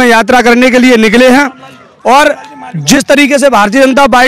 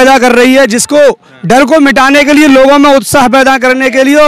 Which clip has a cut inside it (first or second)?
first